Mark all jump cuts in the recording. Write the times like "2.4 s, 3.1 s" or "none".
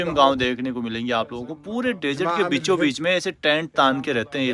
none

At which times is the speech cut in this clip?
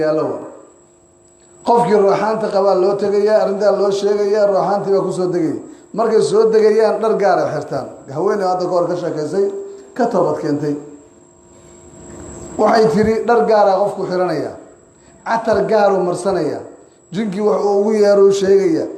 none

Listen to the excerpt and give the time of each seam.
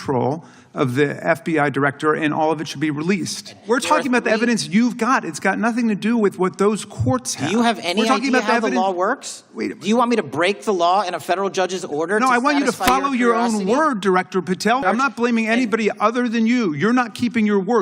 3.6 s, 14.8 s

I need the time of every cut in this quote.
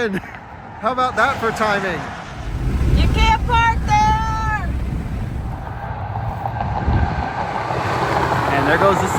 2.6 s, 5.5 s

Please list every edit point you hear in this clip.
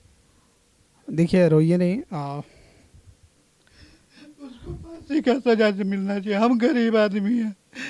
none

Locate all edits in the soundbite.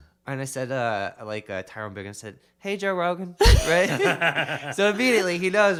none

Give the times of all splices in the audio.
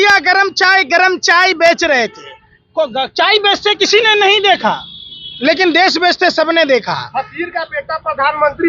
none

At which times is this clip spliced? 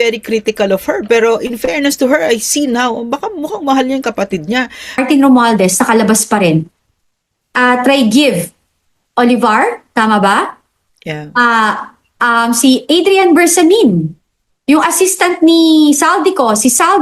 5.0 s

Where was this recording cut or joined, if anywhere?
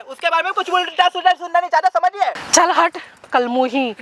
2.4 s

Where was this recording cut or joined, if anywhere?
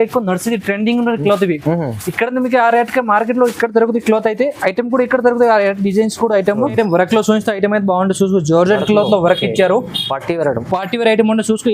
6.7 s

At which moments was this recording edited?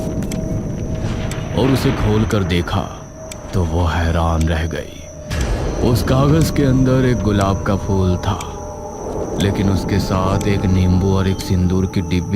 1.5 s

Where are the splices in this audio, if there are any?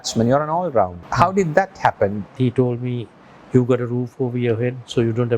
1.0 s, 2.3 s

